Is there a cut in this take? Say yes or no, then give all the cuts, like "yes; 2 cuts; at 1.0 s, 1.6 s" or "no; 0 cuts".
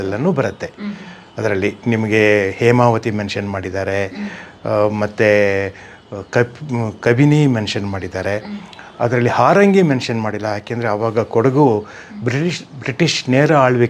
no; 0 cuts